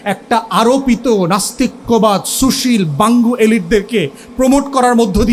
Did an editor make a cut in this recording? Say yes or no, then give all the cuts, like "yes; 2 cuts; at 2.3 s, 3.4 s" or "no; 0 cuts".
no; 0 cuts